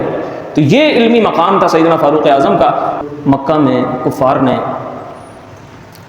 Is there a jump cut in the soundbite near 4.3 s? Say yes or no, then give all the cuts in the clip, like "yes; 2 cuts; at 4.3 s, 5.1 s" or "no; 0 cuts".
no; 1 cut; at 3.0 s